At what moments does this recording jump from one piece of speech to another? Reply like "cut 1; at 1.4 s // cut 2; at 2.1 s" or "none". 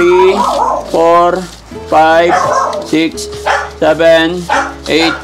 none